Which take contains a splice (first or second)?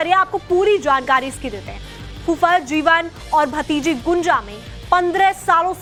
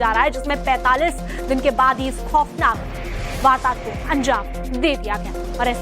second